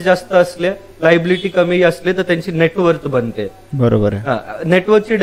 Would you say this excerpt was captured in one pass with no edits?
yes; 0 cuts

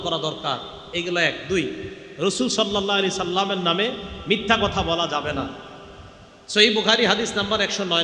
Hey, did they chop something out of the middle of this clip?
no; 0 cuts

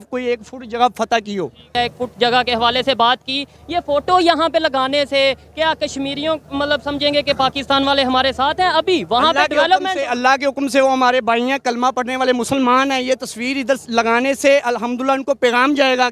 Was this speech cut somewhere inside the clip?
yes; 1 cut; at 1.6 s

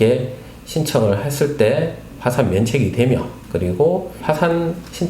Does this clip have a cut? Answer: yes; 2 cuts; at 3.4 s, 4.2 s

